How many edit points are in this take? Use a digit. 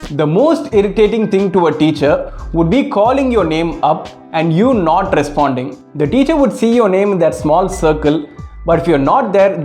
0